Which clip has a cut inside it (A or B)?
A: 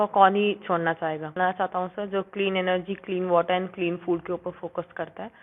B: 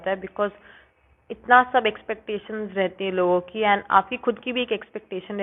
A